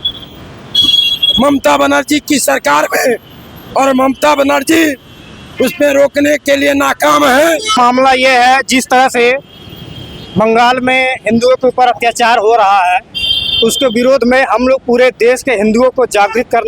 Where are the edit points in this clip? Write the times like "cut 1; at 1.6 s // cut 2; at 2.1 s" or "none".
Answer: cut 1; at 7.7 s

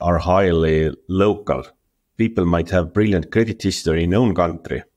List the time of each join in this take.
cut 1; at 2.0 s

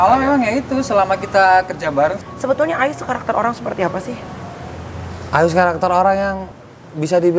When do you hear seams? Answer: cut 1; at 2.2 s

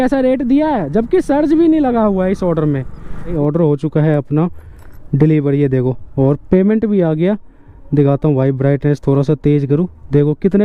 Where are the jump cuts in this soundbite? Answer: cut 1; at 3.1 s

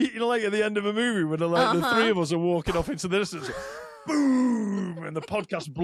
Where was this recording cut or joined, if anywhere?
none

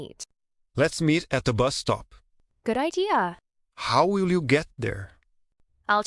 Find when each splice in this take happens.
cut 1; at 3.4 s

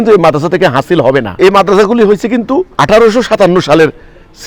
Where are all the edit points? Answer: cut 1; at 1.3 s // cut 2; at 2.7 s

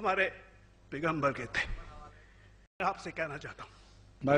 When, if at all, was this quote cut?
cut 1; at 2.8 s

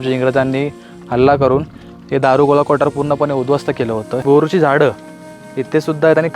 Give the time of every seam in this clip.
cut 1; at 4.2 s

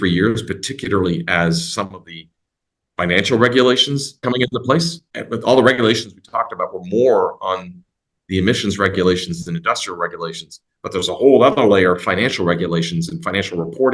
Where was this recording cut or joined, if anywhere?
cut 1; at 4.2 s // cut 2; at 5.0 s

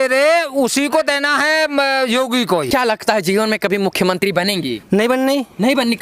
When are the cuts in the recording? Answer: cut 1; at 2.7 s

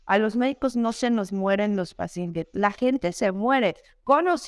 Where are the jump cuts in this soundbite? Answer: none

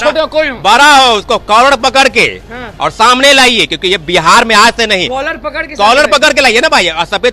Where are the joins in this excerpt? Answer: none

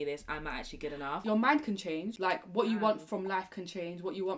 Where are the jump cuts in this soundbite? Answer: cut 1; at 1.2 s

